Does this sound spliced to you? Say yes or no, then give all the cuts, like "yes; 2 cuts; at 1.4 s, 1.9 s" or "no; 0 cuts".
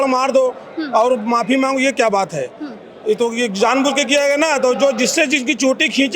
no; 0 cuts